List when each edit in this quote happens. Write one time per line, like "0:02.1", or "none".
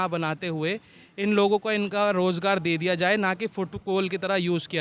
none